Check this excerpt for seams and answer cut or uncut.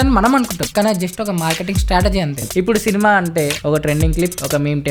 cut